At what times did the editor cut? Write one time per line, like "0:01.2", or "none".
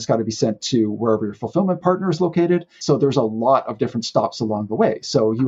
0:02.7